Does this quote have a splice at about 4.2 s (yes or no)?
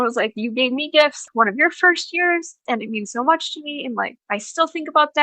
yes